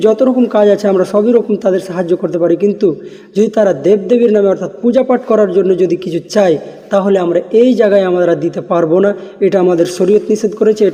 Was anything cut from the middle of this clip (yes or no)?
no